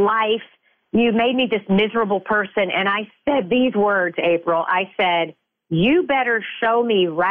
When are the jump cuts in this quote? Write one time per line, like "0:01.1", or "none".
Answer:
none